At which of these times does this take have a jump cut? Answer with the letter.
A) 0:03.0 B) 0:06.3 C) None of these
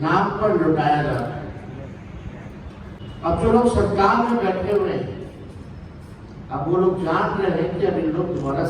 A